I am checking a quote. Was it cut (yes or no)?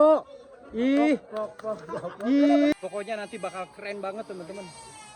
yes